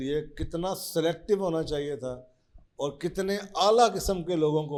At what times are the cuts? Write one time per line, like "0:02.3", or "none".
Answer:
none